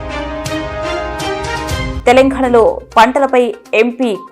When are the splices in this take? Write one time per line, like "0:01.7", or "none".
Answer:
0:01.9